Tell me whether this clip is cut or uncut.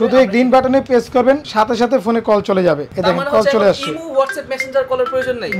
cut